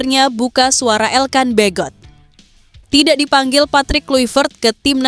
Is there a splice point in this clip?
no; 0 cuts

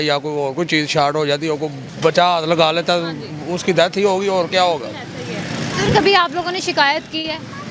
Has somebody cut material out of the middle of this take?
no; 0 cuts

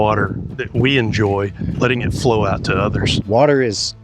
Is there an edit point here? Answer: yes; 2 cuts; at 1.7 s, 3.2 s

